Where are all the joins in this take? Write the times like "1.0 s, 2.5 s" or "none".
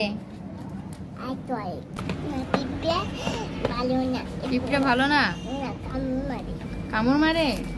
2.0 s